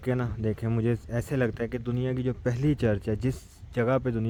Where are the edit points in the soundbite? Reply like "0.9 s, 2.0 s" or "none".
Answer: none

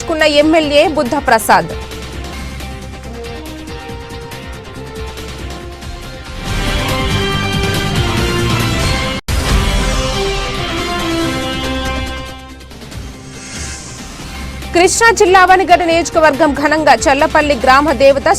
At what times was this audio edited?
14.7 s

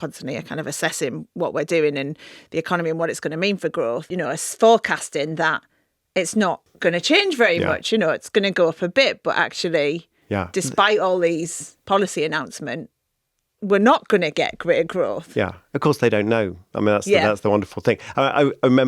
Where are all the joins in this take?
4.1 s

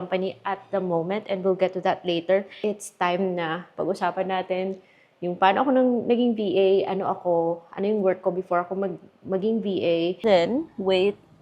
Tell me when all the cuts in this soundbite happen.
2.6 s, 10.2 s

